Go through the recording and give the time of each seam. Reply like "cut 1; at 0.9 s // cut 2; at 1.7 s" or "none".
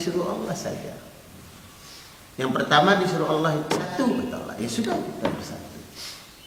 none